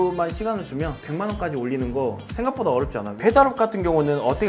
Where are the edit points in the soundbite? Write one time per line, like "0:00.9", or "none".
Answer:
0:03.1